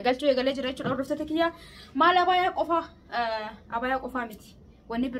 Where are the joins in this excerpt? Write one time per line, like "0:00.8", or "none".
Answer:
none